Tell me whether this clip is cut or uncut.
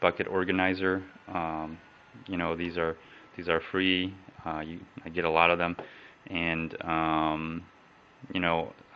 cut